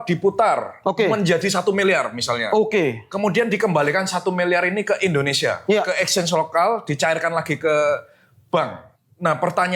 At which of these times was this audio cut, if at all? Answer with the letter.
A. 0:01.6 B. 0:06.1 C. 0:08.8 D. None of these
C